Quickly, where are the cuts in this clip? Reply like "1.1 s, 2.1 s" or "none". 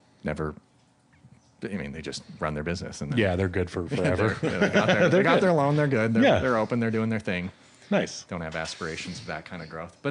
none